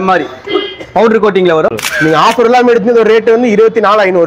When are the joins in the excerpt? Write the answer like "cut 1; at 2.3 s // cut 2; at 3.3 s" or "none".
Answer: cut 1; at 1.7 s